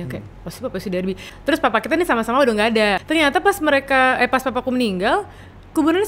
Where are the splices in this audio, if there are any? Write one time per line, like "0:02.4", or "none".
0:01.3
0:03.0